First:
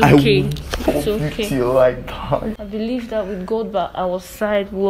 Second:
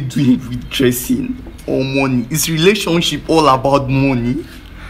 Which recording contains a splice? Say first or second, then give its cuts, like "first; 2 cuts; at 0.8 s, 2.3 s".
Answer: first; 1 cut; at 2.6 s